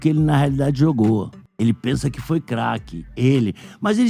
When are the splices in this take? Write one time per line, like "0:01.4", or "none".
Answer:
0:01.4